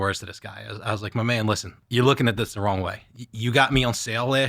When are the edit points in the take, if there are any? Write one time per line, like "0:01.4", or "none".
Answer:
0:01.7